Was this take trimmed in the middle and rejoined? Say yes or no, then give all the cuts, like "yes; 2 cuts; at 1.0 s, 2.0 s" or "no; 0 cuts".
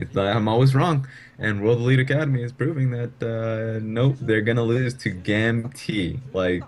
no; 0 cuts